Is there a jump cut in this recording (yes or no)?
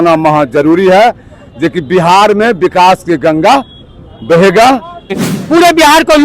yes